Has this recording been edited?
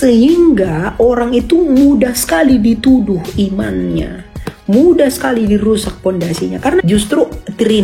yes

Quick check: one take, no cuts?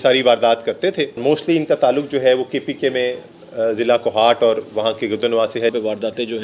no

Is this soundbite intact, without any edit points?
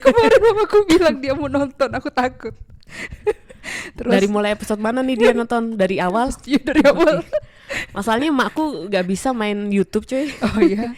yes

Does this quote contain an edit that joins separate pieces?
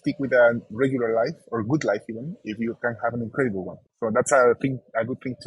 yes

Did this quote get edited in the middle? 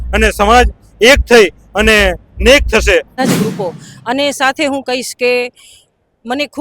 yes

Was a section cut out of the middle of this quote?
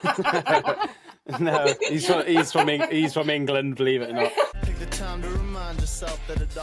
yes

